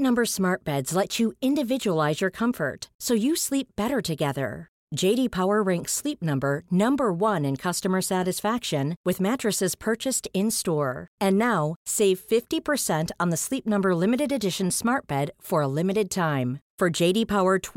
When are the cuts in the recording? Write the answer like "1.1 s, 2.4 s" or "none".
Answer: none